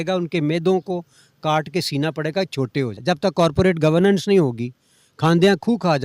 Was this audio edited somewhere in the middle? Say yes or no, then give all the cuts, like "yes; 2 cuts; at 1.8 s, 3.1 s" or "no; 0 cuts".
yes; 1 cut; at 3.0 s